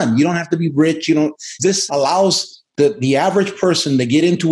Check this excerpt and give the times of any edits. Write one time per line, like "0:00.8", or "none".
0:01.6